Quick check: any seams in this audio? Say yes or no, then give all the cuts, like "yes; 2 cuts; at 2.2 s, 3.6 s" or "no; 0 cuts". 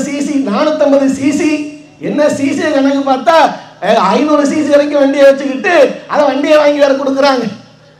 no; 0 cuts